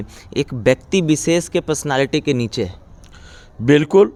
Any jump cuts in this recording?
no; 0 cuts

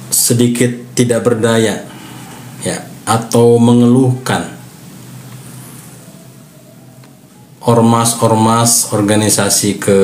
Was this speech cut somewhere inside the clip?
no; 0 cuts

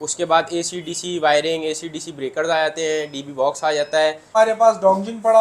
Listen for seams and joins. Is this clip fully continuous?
no; 1 cut; at 4.4 s

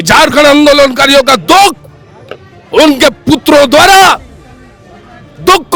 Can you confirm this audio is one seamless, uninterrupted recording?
yes; 0 cuts

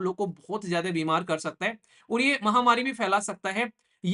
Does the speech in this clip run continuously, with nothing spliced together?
yes; 0 cuts

